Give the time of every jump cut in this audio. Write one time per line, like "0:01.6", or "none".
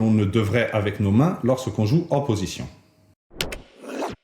0:03.2